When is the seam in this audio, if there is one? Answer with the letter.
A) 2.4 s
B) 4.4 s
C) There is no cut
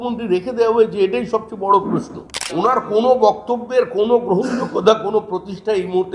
A